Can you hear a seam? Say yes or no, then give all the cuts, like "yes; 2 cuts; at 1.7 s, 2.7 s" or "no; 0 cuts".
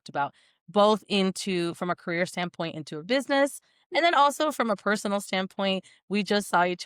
no; 0 cuts